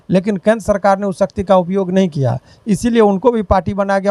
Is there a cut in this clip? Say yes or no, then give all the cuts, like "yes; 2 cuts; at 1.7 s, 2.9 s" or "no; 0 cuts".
no; 0 cuts